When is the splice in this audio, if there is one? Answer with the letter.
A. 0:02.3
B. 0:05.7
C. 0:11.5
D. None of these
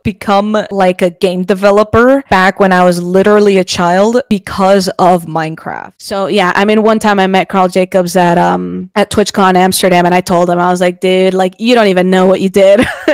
B